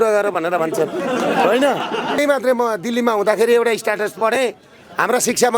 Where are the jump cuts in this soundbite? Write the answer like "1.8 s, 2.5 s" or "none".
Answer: 2.2 s